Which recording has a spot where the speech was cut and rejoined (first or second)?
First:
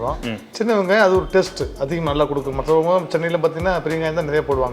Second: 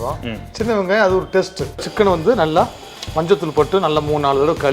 second